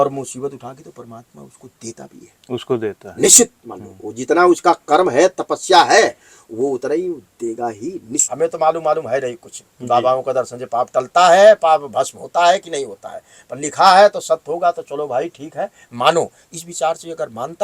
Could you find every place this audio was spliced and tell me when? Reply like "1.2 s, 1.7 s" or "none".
8.2 s

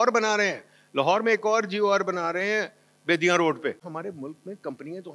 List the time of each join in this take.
4.0 s

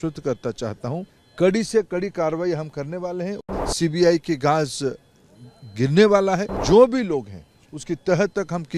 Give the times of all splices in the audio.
1.2 s, 3.4 s, 6.5 s

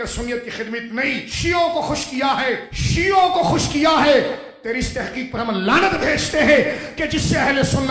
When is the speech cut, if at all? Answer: 1.3 s, 2.7 s

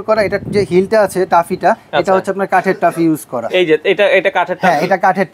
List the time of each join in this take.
none

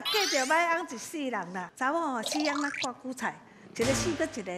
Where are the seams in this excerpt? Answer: 1.6 s

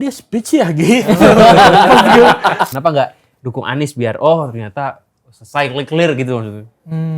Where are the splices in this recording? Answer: 2.7 s

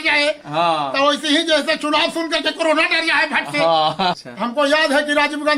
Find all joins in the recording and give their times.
4.2 s

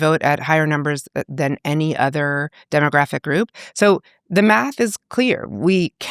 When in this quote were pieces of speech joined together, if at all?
3.5 s

